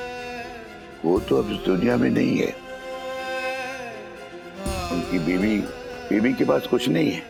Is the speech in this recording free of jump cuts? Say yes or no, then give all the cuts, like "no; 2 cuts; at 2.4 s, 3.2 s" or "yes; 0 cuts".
yes; 0 cuts